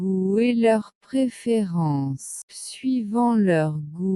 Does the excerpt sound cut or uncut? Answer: uncut